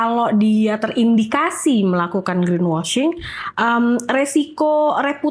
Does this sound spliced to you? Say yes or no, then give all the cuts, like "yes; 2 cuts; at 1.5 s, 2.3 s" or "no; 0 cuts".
no; 0 cuts